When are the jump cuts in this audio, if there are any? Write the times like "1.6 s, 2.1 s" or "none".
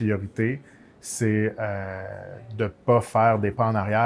none